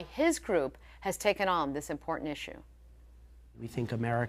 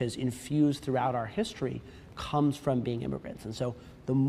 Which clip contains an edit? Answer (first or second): first